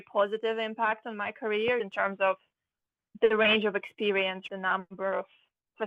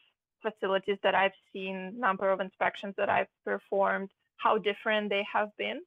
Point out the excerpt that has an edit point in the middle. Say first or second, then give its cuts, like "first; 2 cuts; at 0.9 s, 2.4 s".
first; 2 cuts; at 1.8 s, 4.4 s